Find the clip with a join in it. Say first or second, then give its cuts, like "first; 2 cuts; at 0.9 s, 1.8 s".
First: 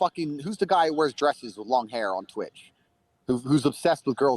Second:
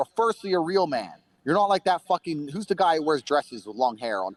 first; 1 cut; at 3.4 s